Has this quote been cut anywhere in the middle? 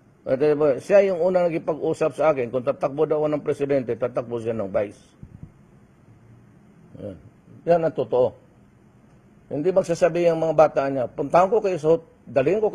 yes; 1 cut; at 9.3 s

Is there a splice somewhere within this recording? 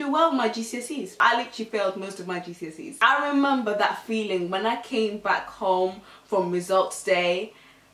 yes; 2 cuts; at 1.2 s, 3.0 s

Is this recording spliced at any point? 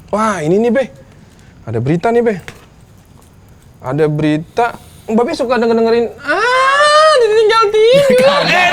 no; 0 cuts

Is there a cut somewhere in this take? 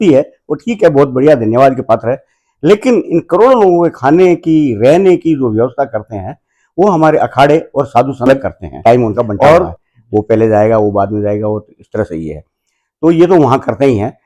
yes; 1 cut; at 8.3 s

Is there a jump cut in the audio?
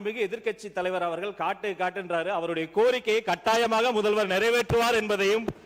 no; 0 cuts

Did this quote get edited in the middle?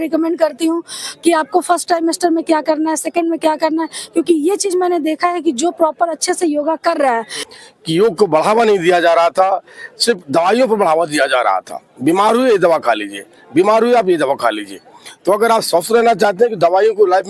yes; 1 cut; at 7.4 s

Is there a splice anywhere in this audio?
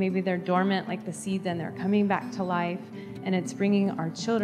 no; 0 cuts

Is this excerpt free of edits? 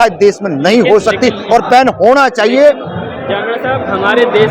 yes; 0 cuts

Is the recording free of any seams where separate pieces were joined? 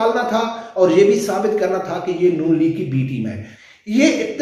no; 1 cut; at 3.5 s

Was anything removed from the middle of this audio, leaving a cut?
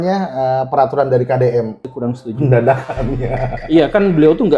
yes; 1 cut; at 1.8 s

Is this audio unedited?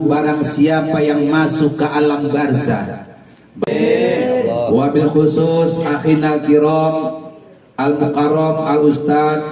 no; 1 cut; at 3.7 s

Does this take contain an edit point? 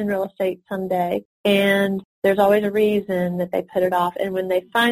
yes; 3 cuts; at 1.3 s, 2.1 s, 3.7 s

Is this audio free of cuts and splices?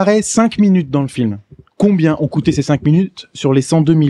yes; 0 cuts

